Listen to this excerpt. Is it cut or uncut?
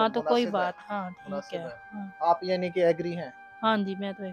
uncut